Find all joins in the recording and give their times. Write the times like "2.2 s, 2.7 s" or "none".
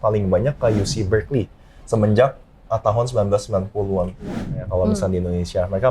4.2 s